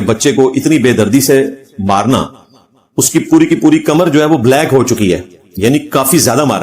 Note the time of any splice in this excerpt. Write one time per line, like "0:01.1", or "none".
none